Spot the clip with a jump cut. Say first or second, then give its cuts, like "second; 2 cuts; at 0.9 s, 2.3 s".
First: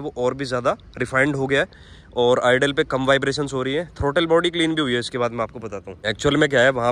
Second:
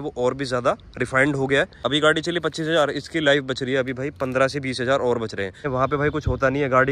second; 2 cuts; at 1.8 s, 5.7 s